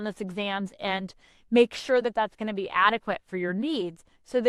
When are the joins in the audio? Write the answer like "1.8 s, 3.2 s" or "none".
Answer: none